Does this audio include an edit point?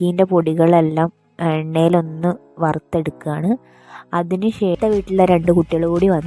yes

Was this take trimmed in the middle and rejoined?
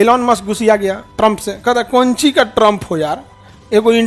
no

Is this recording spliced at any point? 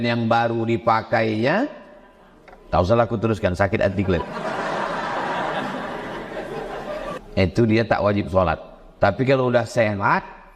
yes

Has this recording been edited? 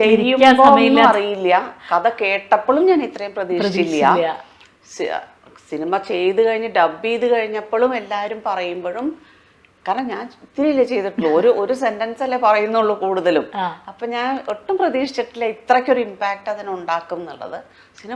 no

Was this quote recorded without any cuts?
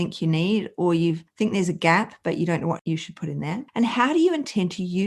no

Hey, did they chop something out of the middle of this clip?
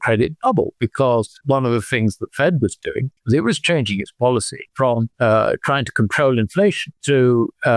yes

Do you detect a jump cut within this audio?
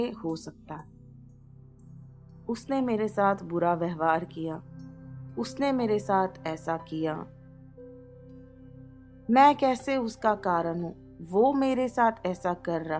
no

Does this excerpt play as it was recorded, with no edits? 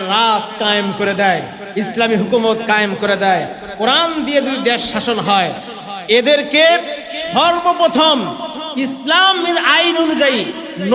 yes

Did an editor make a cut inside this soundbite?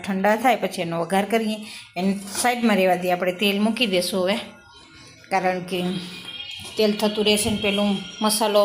no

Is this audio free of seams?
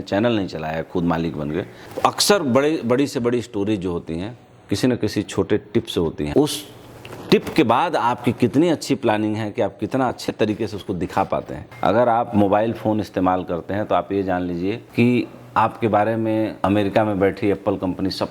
no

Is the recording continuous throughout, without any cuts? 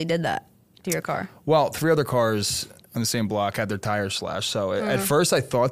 yes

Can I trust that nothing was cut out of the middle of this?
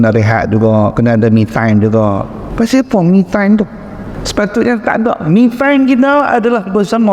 yes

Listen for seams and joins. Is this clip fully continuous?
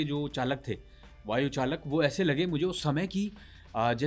yes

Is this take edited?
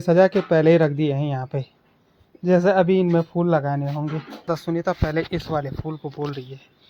yes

